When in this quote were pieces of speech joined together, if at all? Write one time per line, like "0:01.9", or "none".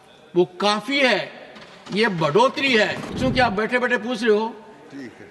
0:03.1